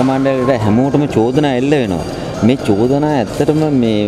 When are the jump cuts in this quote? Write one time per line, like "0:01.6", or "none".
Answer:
none